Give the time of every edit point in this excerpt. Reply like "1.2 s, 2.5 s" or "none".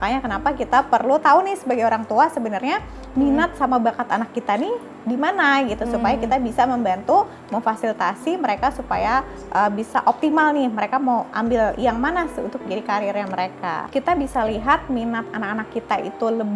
13.9 s